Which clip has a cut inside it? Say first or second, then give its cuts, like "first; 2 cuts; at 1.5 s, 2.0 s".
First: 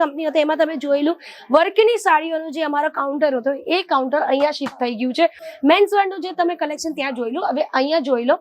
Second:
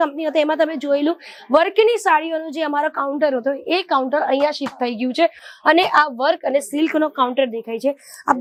first; 1 cut; at 5.5 s